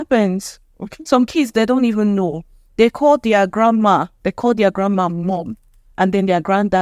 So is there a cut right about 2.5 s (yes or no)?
no